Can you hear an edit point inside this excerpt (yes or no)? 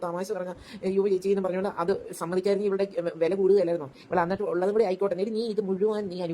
yes